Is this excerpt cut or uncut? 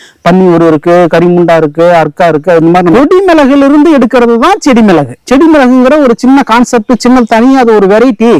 cut